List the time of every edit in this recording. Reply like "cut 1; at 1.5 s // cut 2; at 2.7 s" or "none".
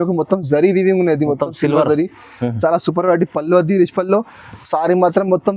none